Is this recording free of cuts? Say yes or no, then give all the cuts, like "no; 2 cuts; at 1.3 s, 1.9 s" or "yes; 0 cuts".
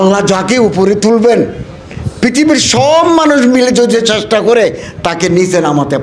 yes; 0 cuts